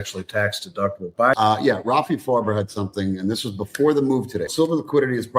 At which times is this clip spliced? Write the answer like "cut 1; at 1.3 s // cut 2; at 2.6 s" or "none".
cut 1; at 1.3 s // cut 2; at 4.5 s